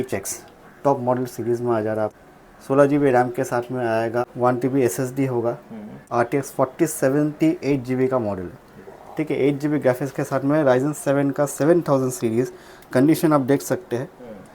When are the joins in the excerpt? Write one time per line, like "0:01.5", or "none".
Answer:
0:02.2
0:04.2
0:06.0

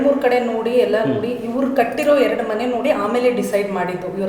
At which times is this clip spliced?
none

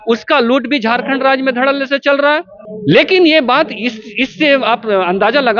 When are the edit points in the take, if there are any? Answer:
0:02.6

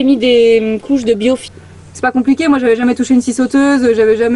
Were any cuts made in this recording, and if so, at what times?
0:01.4

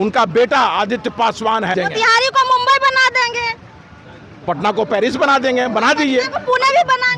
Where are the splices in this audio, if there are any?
0:01.7

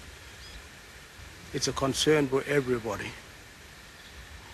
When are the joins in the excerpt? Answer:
0:03.6

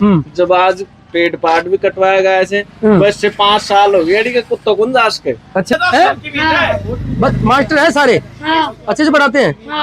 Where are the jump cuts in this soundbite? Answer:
0:05.7

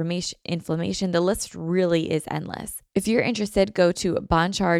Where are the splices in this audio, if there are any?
0:02.7

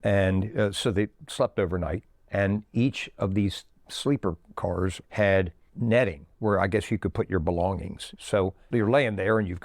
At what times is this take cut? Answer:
0:02.1
0:05.0
0:08.7

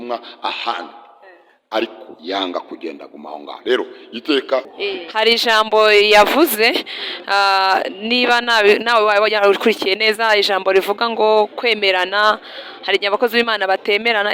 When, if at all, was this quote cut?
0:04.7

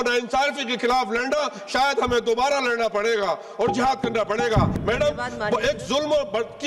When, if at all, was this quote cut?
0:04.7

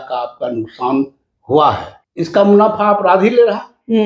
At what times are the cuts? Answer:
0:01.9

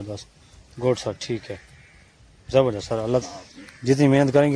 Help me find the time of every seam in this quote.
0:03.2

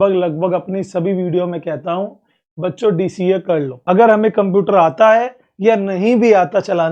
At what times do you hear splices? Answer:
0:03.7

